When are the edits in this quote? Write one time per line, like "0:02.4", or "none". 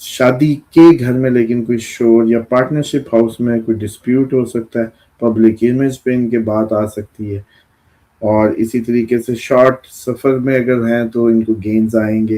0:07.6